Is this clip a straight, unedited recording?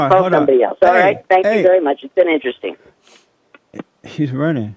yes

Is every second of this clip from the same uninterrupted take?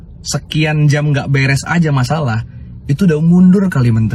yes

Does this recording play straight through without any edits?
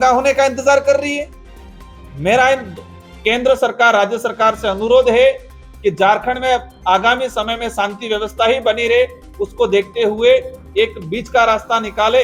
yes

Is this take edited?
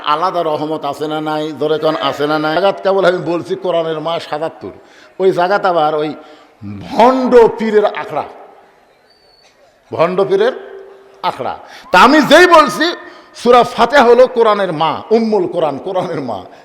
yes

